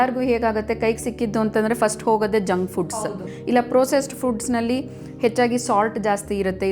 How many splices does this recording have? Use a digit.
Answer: 1